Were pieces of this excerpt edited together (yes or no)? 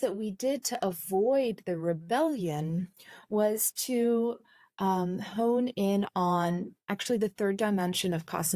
no